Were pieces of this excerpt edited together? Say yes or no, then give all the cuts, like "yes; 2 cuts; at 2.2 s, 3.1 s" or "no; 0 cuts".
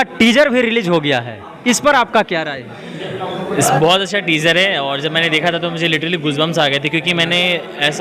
no; 0 cuts